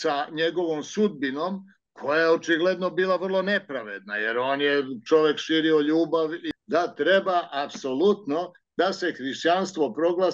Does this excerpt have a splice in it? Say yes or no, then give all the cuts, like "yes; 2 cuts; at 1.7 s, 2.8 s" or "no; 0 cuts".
yes; 1 cut; at 6.5 s